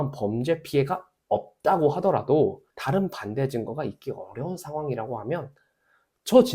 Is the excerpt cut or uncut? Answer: cut